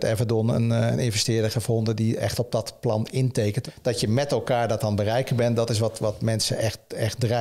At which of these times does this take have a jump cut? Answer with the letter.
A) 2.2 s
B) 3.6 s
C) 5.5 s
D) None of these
B